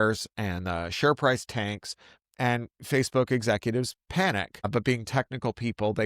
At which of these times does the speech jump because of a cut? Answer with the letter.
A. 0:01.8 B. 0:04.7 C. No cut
B